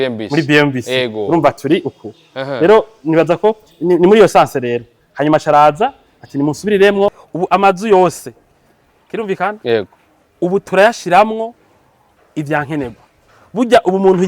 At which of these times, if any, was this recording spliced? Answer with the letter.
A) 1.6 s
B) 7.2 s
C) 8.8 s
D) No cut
B